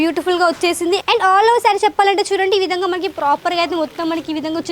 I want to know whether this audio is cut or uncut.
cut